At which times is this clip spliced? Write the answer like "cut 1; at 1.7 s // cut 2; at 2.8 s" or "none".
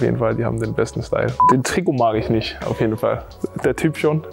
cut 1; at 1.5 s // cut 2; at 3.3 s